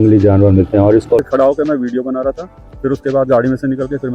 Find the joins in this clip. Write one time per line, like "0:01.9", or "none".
0:01.2